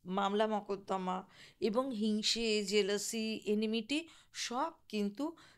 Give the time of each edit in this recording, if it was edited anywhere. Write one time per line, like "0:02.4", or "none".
none